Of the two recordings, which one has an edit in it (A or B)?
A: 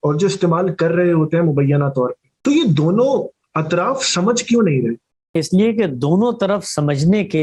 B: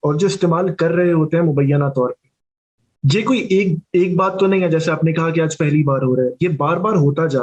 A